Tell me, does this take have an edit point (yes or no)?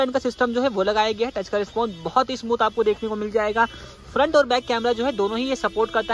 no